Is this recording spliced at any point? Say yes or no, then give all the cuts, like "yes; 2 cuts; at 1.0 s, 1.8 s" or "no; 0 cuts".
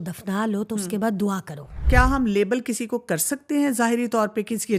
yes; 1 cut; at 1.8 s